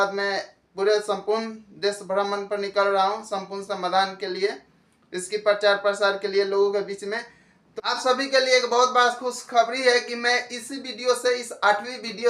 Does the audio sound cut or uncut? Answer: cut